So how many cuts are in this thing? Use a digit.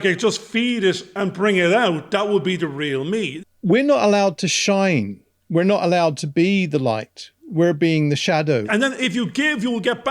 2